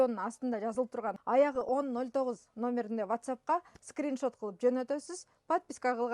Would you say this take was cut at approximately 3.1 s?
no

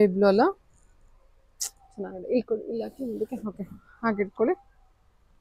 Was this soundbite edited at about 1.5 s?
no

